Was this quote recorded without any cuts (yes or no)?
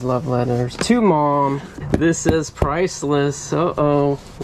no